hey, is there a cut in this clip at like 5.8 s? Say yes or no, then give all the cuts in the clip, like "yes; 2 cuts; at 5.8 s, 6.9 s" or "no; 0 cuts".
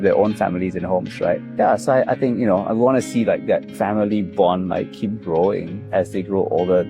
yes; 1 cut; at 5.8 s